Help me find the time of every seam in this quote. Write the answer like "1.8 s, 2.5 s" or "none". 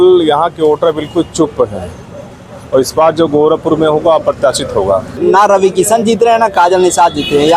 5.2 s